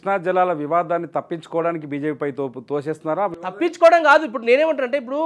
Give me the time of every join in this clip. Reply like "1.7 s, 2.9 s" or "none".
none